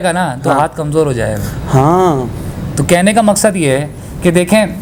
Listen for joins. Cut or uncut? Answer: uncut